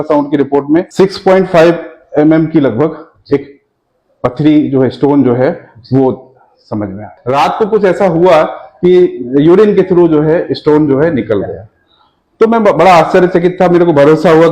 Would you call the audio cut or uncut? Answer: cut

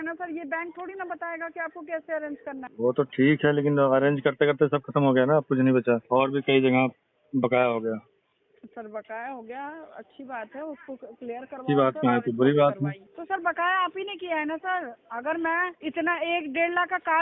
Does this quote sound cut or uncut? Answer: cut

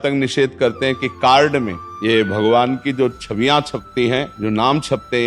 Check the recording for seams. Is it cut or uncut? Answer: cut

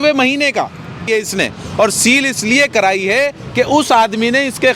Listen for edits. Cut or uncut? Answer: cut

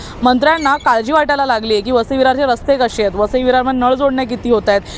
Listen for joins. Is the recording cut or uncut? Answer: uncut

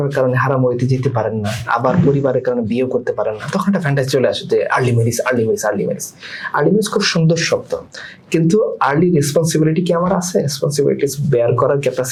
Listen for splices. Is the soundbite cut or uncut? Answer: uncut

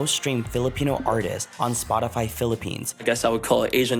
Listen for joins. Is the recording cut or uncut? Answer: cut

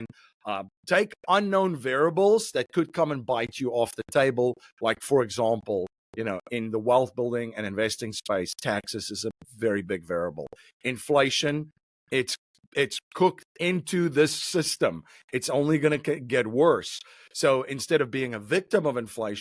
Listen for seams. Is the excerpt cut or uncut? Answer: uncut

